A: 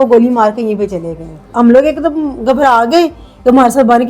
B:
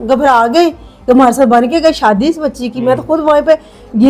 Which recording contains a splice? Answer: A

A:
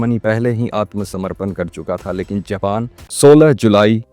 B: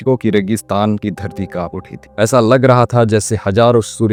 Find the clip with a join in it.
A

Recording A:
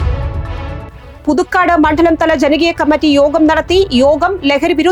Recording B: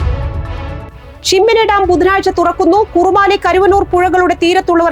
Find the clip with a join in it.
B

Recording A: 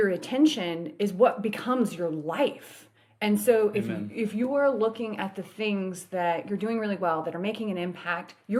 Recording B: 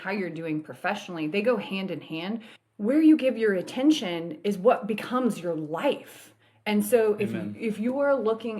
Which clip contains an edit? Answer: B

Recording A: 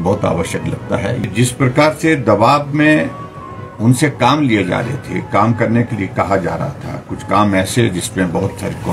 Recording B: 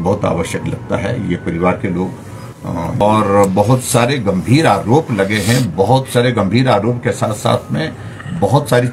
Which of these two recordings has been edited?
A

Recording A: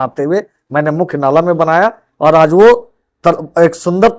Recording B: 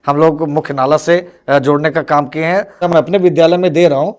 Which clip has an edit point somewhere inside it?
B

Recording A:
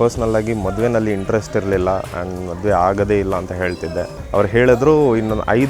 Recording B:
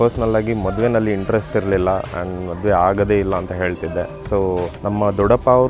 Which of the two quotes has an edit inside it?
A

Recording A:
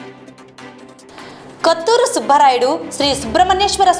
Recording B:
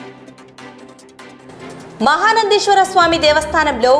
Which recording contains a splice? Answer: A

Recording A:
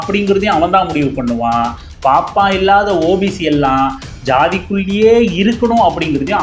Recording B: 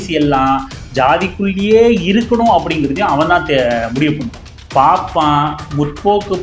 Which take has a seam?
B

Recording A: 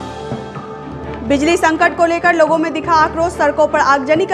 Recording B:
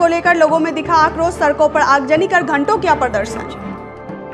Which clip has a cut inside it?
A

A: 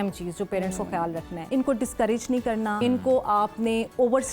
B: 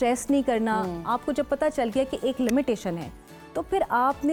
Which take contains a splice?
A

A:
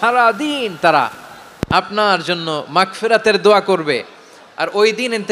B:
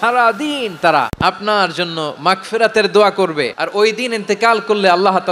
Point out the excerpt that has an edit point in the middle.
B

